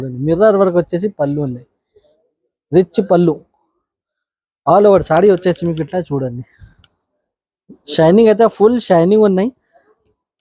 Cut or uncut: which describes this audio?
uncut